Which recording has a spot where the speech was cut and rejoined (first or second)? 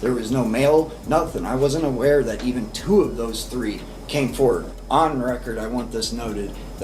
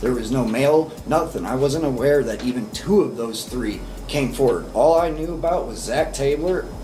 first